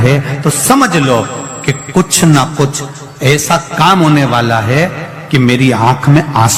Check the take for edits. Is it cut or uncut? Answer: uncut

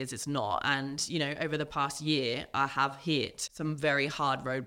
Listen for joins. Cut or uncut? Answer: cut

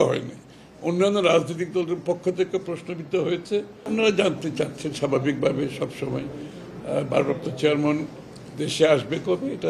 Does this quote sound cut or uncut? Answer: cut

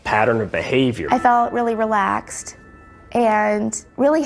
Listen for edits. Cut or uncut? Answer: cut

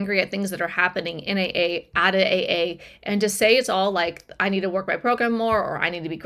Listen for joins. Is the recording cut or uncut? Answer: uncut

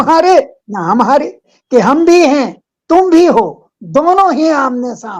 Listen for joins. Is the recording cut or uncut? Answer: cut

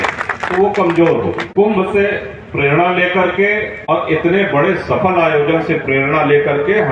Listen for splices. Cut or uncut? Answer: cut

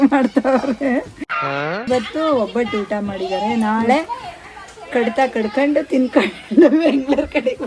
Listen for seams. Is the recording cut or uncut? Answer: cut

